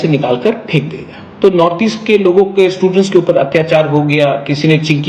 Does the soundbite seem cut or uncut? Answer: cut